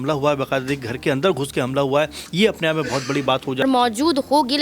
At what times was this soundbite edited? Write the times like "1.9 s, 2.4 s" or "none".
3.6 s

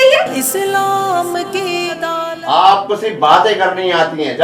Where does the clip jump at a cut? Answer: 2.4 s

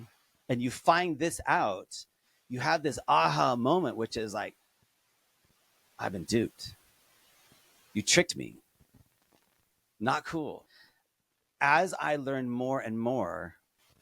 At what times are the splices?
10.6 s

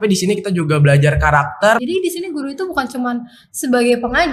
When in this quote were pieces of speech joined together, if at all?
1.8 s

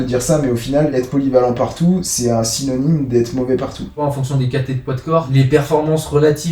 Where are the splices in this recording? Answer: 0.9 s, 4.0 s, 5.3 s

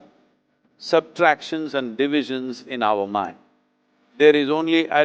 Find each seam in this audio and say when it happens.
none

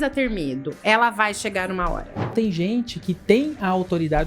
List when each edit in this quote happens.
2.3 s

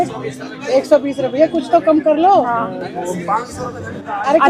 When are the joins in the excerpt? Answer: none

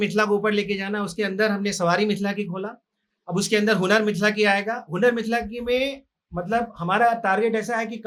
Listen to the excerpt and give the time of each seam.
none

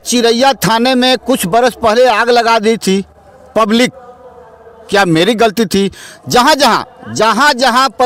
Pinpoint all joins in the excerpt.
none

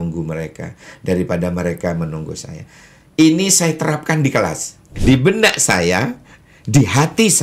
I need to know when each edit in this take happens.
4.9 s

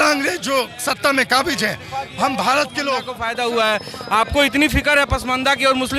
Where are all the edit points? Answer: 3.1 s

